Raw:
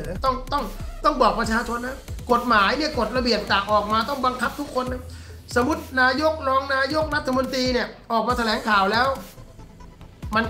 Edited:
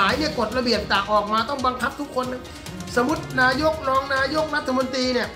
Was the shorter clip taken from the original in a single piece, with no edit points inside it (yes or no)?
yes